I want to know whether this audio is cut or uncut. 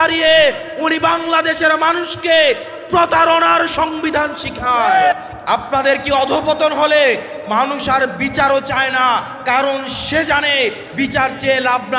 cut